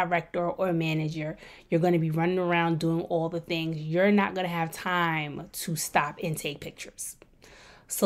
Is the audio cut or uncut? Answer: uncut